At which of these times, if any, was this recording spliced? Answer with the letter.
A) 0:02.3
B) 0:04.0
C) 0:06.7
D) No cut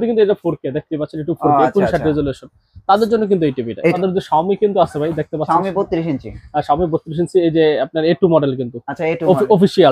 B